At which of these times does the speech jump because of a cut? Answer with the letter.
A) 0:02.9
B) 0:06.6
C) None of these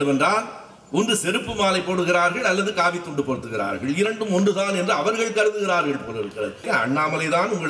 B